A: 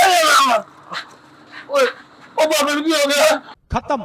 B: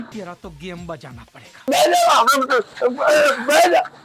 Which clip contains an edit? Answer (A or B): B